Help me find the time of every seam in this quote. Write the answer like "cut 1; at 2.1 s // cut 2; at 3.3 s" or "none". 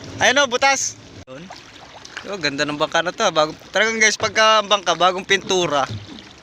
cut 1; at 1.2 s

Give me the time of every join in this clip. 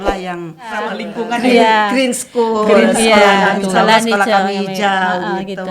cut 1; at 1.0 s

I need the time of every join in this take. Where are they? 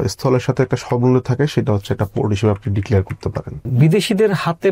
cut 1; at 3.7 s

